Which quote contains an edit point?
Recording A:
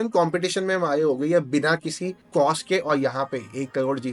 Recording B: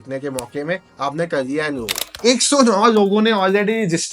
B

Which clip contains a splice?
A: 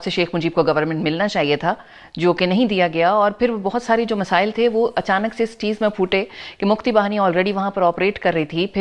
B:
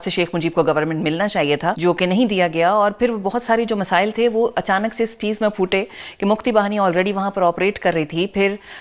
B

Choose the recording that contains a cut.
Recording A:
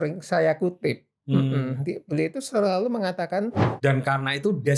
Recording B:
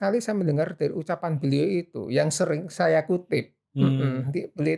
A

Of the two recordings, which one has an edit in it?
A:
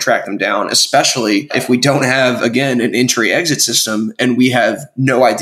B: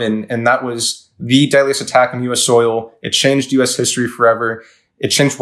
A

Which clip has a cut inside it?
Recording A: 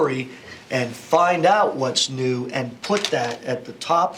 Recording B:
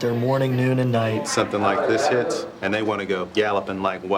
B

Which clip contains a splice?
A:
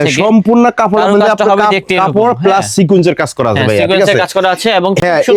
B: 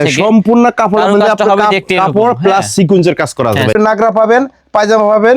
B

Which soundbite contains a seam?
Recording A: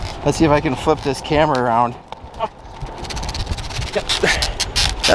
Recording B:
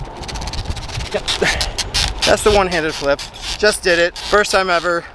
B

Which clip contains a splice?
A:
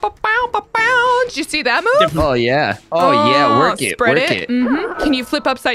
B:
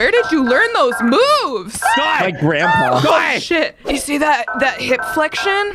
B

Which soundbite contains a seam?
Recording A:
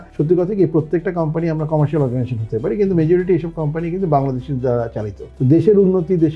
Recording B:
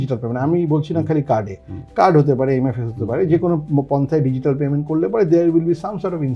A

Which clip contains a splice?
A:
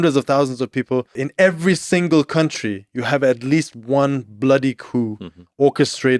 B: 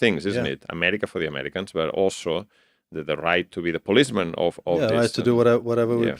A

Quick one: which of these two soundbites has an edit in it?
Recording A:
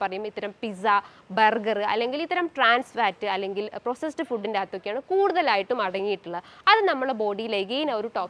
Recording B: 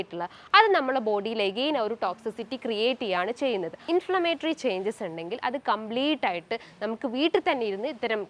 B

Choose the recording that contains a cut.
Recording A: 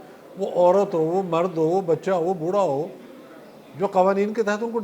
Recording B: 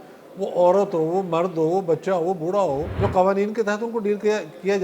B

